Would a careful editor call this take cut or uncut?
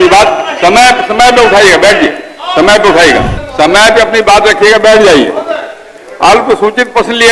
cut